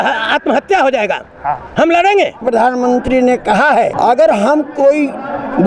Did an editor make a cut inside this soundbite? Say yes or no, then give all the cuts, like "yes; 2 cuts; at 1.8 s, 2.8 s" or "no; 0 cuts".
yes; 2 cuts; at 2.4 s, 3.9 s